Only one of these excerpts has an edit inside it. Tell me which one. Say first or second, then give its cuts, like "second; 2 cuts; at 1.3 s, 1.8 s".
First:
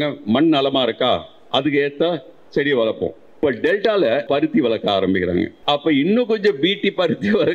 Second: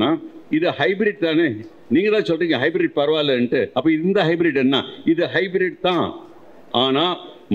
first; 3 cuts; at 3.2 s, 4.2 s, 5.6 s